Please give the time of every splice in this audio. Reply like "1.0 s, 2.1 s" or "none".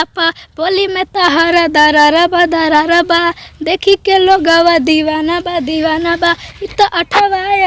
none

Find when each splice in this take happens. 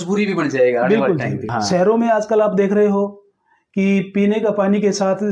1.5 s

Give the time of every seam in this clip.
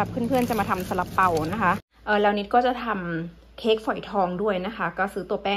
1.9 s

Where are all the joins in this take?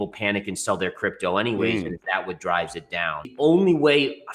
3.3 s

